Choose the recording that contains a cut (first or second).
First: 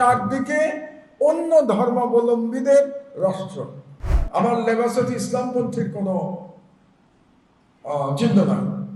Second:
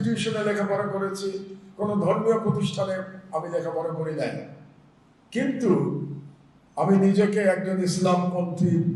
first